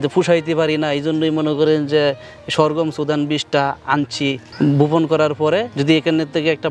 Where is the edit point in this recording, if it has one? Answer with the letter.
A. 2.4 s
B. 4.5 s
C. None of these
C